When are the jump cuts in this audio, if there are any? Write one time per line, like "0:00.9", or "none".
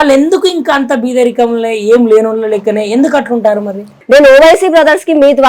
0:03.9

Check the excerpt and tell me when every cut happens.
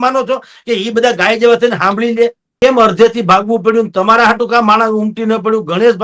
0:02.4

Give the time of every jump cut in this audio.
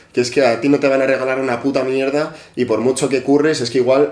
none

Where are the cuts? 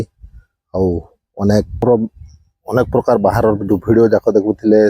0:01.8

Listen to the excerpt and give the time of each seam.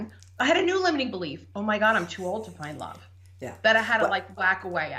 none

